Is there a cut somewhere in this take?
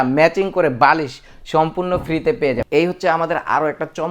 yes; 1 cut; at 2.6 s

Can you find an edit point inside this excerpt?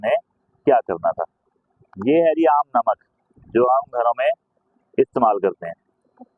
no; 0 cuts

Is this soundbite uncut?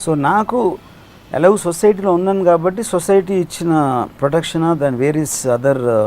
no; 1 cut; at 4.2 s

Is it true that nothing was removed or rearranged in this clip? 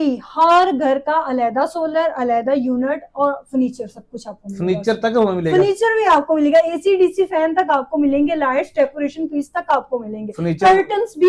yes; 0 cuts

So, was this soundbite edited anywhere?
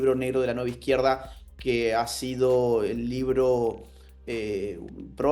no; 0 cuts

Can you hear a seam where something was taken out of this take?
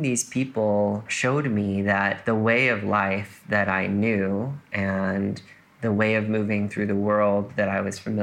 yes; 2 cuts; at 1.1 s, 2.2 s

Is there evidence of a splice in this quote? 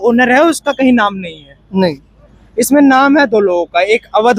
no; 0 cuts

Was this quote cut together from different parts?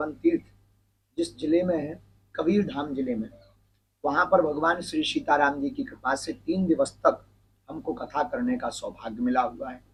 no; 0 cuts

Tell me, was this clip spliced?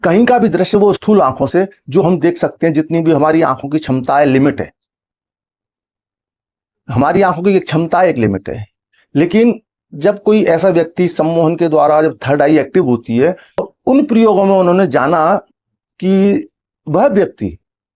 yes; 1 cut; at 13.7 s

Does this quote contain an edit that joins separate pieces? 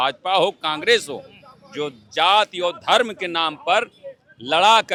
no; 0 cuts

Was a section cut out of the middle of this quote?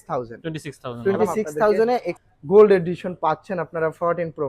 yes; 1 cut; at 2.1 s

